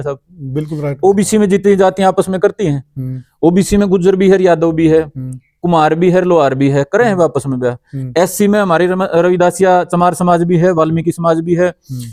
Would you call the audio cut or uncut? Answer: uncut